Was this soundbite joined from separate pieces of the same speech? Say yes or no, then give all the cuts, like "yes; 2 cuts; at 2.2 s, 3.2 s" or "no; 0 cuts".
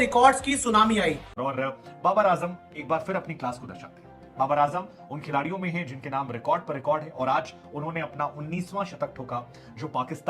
yes; 1 cut; at 1.3 s